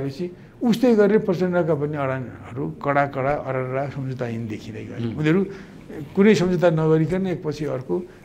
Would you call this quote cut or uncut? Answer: uncut